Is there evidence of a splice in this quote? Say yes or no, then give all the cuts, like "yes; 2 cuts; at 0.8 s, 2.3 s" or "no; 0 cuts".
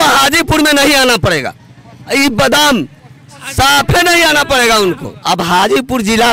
yes; 1 cut; at 5.1 s